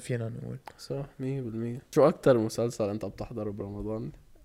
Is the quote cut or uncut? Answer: cut